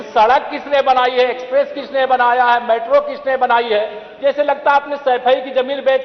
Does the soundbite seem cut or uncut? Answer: uncut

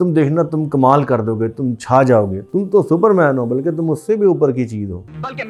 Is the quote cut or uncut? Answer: uncut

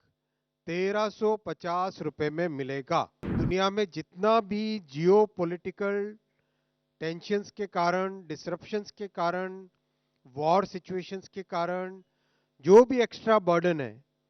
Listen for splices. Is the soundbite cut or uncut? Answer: cut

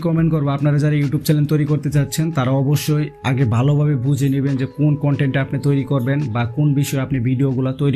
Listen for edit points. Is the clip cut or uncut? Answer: uncut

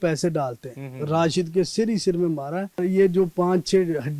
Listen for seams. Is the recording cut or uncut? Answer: cut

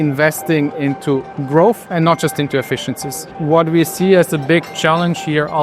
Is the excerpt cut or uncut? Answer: cut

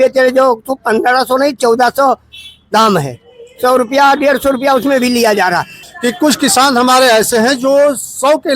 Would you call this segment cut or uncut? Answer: cut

